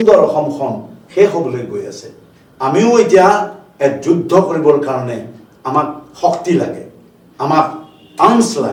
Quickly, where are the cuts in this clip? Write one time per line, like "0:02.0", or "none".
none

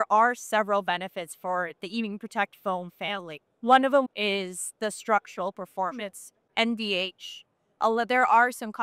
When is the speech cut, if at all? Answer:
0:04.1
0:06.4

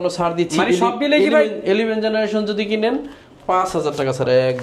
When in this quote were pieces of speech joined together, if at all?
none

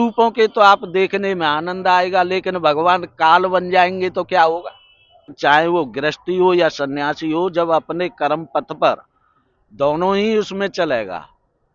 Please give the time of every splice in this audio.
0:05.3

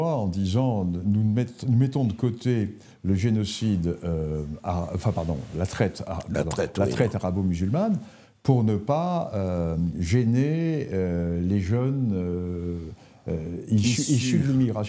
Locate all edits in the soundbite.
none

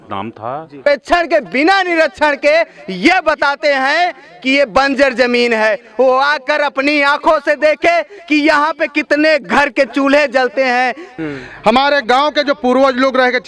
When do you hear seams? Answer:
0:00.8
0:11.1

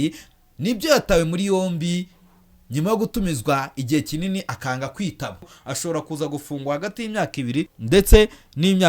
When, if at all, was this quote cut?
0:05.6
0:07.8

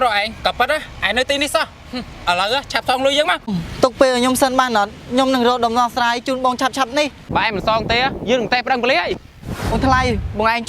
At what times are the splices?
0:03.5
0:07.2
0:09.7

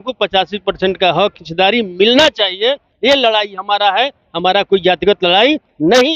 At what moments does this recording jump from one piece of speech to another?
none

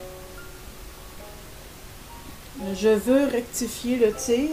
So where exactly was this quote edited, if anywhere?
0:02.7

